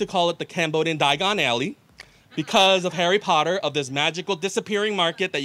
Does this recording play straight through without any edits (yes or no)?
yes